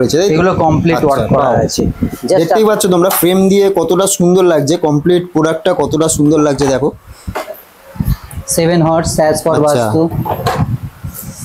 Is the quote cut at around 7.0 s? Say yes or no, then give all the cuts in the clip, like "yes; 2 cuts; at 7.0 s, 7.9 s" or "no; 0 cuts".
no; 0 cuts